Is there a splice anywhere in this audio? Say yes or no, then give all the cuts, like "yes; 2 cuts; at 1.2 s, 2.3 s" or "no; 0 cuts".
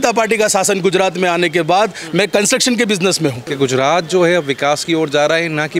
yes; 1 cut; at 3.4 s